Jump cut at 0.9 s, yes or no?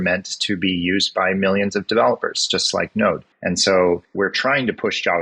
no